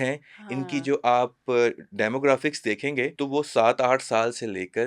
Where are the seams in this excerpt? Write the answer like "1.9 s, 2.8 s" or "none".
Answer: 3.2 s